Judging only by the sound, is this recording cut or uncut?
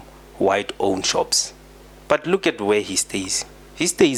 uncut